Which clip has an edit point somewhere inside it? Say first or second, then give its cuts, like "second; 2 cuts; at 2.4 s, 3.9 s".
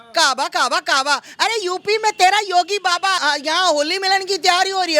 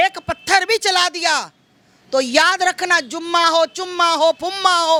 first; 1 cut; at 3.2 s